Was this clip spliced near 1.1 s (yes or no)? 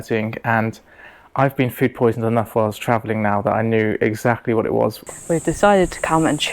no